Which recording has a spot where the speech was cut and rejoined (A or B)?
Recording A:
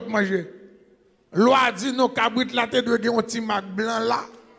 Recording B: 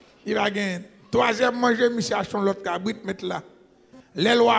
B